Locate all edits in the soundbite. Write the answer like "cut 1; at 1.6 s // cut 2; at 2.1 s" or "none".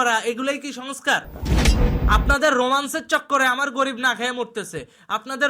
cut 1; at 2.0 s